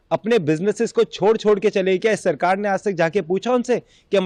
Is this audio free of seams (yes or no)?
yes